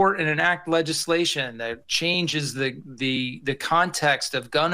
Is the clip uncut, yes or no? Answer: yes